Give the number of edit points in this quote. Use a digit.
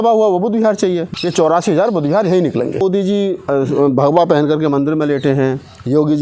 2